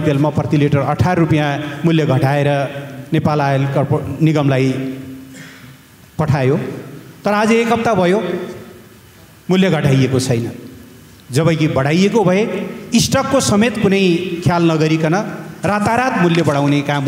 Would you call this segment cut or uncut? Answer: uncut